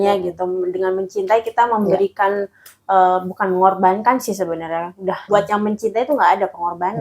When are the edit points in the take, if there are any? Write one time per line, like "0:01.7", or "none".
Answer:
0:05.2